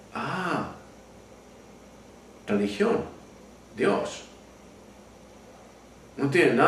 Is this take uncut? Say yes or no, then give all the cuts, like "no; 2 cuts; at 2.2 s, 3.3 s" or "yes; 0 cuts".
yes; 0 cuts